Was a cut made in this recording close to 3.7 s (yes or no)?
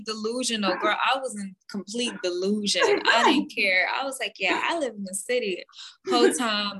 no